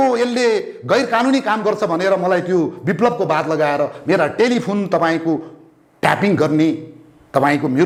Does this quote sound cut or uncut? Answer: uncut